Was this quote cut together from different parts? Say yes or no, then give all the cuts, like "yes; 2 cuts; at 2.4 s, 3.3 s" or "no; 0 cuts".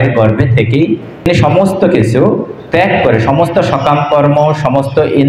yes; 1 cut; at 1.3 s